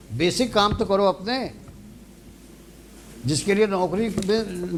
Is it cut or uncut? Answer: uncut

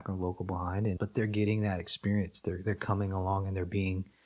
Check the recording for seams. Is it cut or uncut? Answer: cut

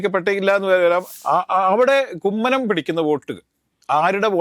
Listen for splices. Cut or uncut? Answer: cut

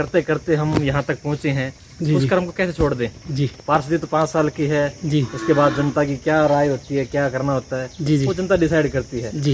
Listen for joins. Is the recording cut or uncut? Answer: uncut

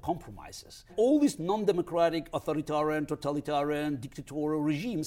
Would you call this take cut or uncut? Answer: cut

